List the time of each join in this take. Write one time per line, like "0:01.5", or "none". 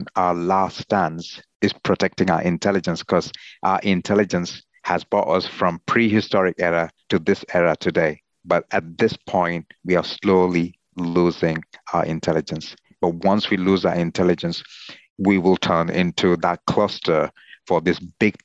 none